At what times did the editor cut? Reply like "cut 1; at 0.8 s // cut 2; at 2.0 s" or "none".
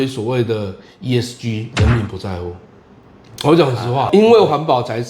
cut 1; at 4.1 s